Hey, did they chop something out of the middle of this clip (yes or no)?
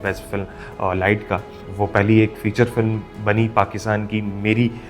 yes